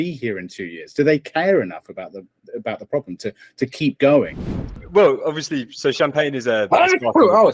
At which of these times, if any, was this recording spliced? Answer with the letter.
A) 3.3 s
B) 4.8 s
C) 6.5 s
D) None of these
B